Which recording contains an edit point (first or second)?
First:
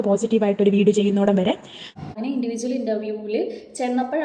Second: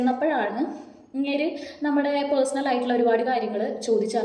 first